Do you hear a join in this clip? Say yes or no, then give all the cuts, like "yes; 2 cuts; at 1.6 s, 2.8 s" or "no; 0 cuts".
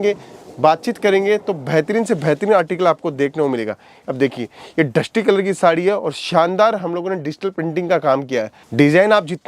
yes; 1 cut; at 8.6 s